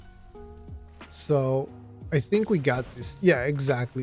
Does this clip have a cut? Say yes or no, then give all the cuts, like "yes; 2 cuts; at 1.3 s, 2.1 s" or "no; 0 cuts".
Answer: yes; 1 cut; at 1.2 s